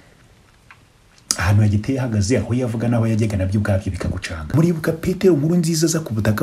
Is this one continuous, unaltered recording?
no; 1 cut; at 4.3 s

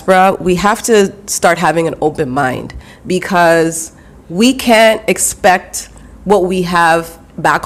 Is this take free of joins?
yes; 0 cuts

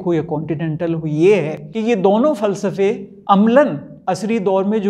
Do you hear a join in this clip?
yes; 3 cuts; at 1.6 s, 3.1 s, 3.9 s

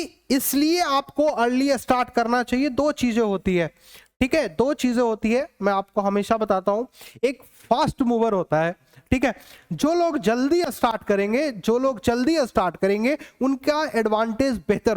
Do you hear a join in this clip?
no; 0 cuts

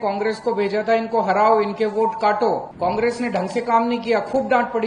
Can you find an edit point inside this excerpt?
yes; 1 cut; at 2.7 s

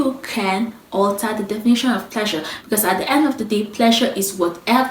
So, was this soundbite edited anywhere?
no; 0 cuts

